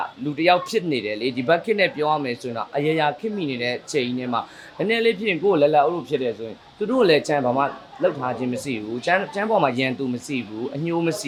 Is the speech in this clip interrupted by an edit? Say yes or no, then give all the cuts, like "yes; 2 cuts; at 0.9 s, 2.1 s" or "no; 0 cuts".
no; 0 cuts